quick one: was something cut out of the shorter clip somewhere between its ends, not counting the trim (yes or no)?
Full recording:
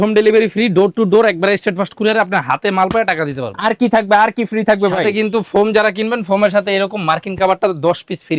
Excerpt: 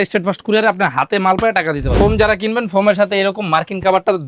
yes